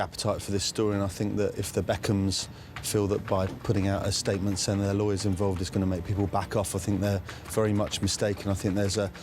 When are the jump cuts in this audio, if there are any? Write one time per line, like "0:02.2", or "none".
none